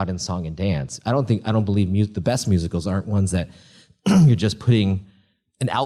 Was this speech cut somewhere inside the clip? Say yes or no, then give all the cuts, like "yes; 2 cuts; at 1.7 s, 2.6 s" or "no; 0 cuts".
no; 0 cuts